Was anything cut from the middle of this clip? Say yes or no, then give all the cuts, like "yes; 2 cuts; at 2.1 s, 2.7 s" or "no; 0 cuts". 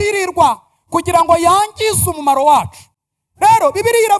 no; 0 cuts